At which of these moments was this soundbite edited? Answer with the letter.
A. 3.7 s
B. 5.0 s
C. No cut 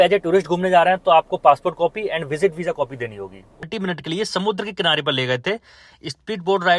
A